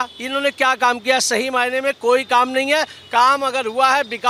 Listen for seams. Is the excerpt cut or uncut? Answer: uncut